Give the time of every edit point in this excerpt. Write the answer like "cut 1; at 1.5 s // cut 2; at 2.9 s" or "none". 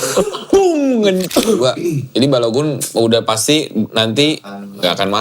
cut 1; at 1.2 s